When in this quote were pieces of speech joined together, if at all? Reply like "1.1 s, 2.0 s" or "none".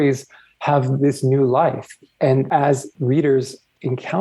2.6 s